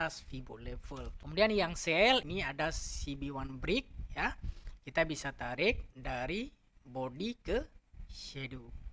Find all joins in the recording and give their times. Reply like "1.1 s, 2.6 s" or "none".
1.2 s, 2.2 s